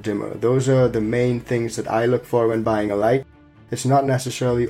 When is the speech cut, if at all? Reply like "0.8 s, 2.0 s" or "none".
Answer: 3.5 s